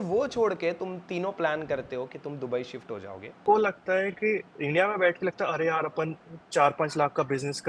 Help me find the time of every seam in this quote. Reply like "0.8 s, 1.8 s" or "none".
3.4 s